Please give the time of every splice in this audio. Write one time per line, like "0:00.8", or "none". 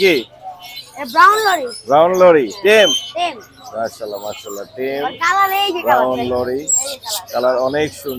none

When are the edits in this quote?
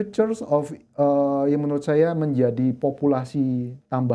none

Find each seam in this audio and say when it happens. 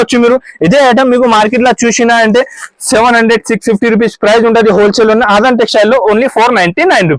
none

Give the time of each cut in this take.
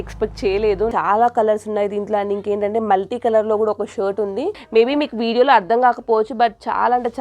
0:00.9
0:04.6

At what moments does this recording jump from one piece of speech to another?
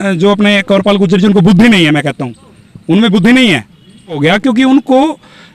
0:04.2

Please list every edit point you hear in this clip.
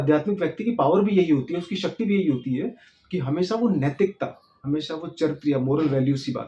none

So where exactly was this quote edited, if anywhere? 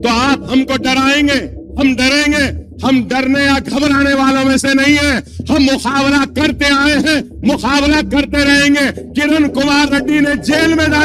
0:01.6

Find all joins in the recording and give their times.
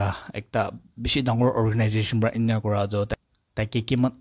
none

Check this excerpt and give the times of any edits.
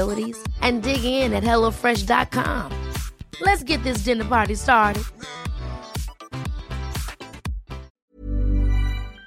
0:08.1

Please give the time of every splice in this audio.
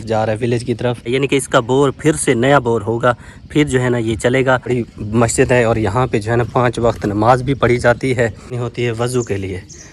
0:01.1
0:04.7
0:08.6

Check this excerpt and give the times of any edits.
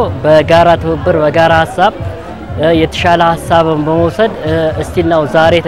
none

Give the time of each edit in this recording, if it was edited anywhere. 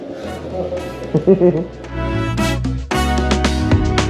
none

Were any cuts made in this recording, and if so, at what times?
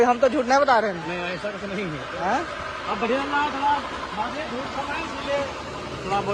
none

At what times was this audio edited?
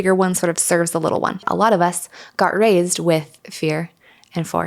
0:01.5

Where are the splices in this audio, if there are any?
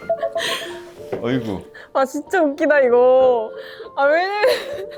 none

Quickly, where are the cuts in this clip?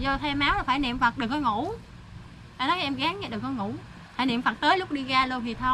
none

